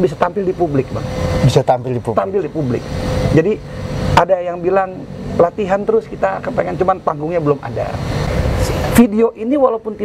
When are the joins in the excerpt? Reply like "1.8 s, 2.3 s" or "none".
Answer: 8.3 s